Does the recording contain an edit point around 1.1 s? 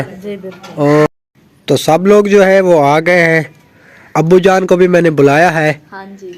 yes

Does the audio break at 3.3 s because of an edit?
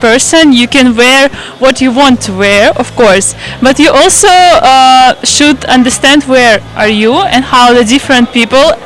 no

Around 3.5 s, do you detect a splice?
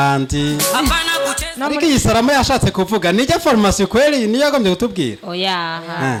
no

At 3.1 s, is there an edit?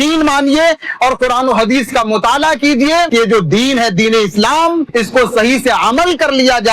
yes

